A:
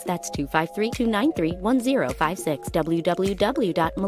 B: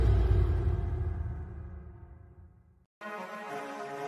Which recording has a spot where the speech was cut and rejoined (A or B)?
B